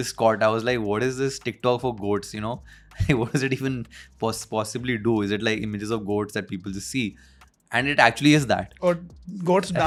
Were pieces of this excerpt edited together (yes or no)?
no